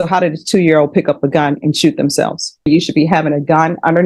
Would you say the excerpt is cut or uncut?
cut